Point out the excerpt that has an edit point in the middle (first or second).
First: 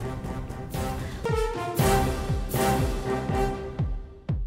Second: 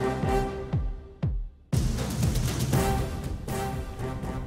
second